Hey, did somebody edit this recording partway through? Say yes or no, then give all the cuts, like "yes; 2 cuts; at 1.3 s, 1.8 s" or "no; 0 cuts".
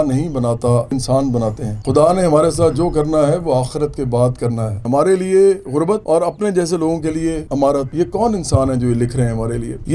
yes; 4 cuts; at 0.9 s, 1.7 s, 4.8 s, 7.9 s